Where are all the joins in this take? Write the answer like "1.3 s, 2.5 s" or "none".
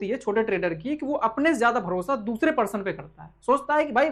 none